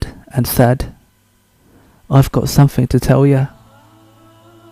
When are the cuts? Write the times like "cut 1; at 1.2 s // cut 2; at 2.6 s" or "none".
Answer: cut 1; at 3.4 s